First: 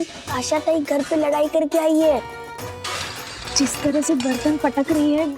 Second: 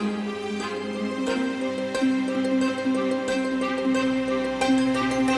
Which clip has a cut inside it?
second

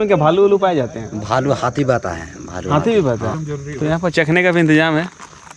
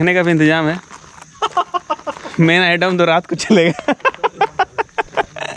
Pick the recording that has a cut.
first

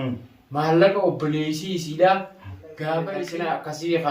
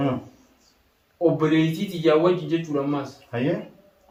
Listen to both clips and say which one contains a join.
first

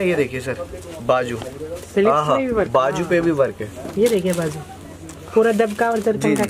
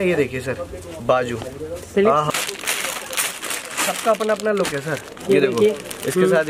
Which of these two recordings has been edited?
second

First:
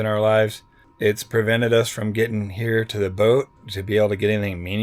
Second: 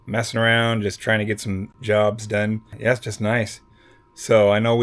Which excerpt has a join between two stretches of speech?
second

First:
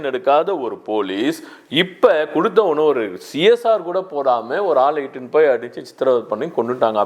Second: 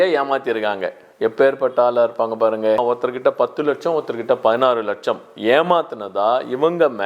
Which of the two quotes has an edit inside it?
second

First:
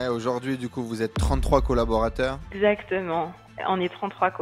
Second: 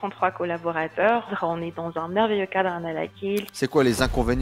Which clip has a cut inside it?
second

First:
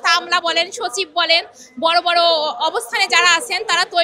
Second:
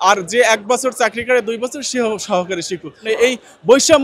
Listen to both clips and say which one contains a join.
second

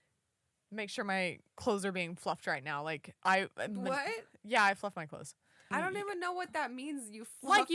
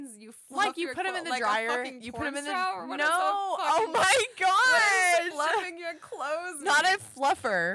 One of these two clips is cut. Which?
first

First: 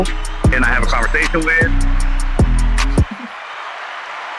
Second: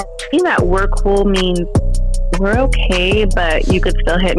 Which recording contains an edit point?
first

